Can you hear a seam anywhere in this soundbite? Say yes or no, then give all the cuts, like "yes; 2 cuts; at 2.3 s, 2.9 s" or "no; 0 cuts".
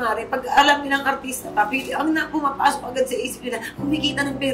no; 0 cuts